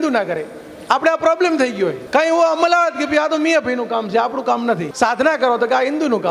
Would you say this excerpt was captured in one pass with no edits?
no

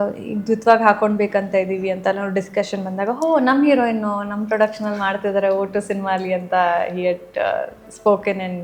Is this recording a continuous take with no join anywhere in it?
yes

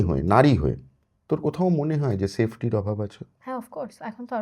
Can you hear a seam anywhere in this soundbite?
no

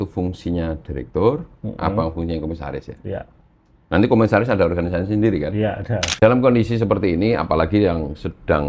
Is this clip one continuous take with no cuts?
no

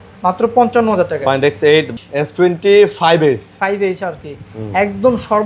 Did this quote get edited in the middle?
yes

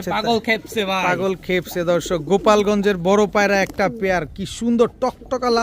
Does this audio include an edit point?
no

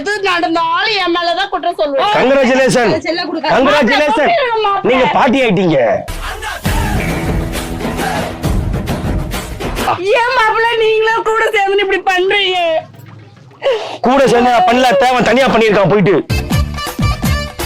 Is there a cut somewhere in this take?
yes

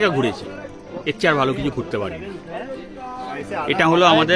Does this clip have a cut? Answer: no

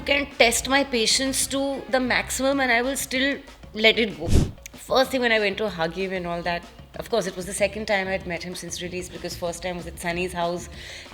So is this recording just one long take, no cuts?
no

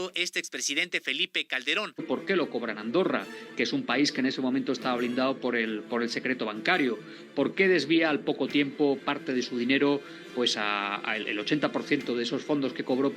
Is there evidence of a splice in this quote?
yes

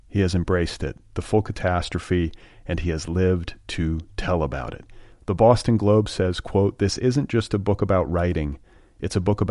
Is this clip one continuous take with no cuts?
yes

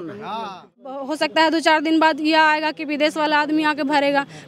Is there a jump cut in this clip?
yes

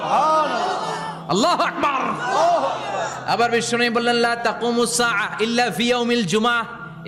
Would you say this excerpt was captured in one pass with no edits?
yes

